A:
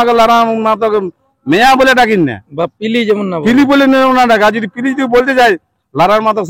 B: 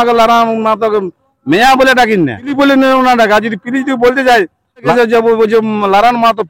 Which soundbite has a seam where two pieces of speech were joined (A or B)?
B